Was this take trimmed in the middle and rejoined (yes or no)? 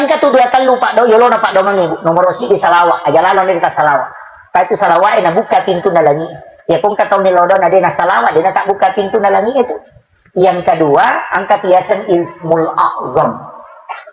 no